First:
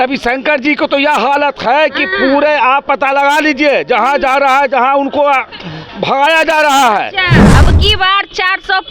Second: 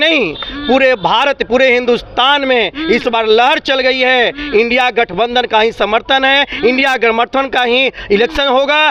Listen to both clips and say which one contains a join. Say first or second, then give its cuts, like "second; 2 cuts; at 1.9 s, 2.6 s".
first; 1 cut; at 7.4 s